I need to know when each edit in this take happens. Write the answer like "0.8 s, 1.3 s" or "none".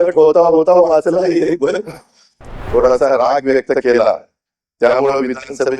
2.5 s